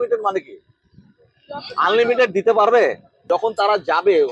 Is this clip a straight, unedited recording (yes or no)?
no